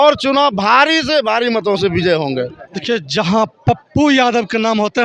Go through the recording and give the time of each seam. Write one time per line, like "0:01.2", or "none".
0:02.7